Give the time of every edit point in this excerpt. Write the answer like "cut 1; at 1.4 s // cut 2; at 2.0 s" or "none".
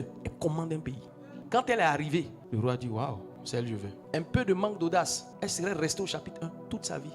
cut 1; at 1.4 s